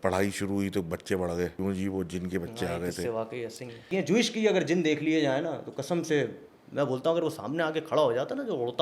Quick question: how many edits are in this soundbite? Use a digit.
2